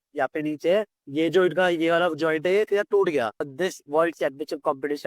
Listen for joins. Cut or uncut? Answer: cut